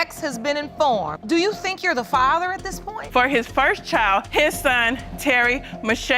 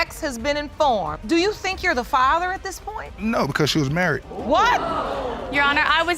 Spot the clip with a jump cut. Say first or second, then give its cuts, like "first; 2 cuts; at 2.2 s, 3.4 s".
first; 1 cut; at 3.0 s